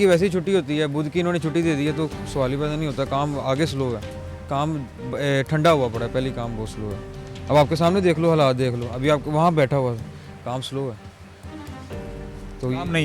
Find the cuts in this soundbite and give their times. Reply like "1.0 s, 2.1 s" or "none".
none